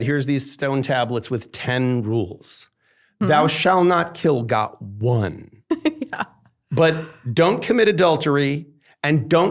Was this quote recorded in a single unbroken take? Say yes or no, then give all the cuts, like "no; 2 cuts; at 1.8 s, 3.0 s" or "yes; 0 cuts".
yes; 0 cuts